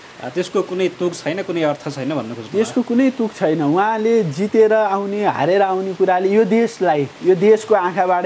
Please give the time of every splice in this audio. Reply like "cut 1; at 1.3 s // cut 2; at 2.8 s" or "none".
none